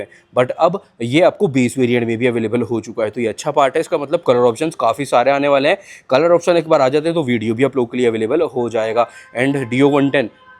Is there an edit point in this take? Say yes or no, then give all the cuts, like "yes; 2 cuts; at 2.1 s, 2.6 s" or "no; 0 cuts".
no; 0 cuts